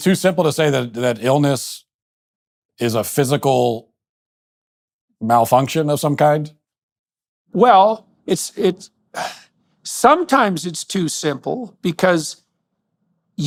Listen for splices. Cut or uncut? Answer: uncut